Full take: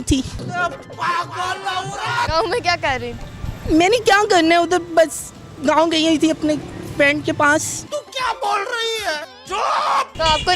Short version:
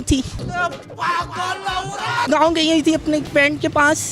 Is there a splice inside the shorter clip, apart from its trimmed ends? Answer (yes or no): yes